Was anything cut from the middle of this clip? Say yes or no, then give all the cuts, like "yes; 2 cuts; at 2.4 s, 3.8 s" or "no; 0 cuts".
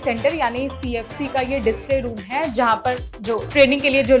no; 0 cuts